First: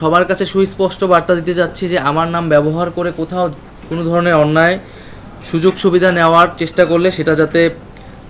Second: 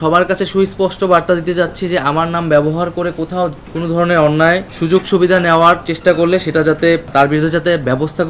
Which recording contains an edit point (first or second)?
second